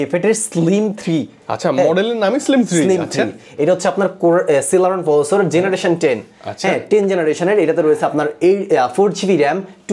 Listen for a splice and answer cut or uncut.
uncut